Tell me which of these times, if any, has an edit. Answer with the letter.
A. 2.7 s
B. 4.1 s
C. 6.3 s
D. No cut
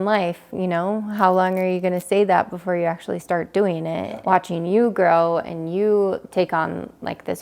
B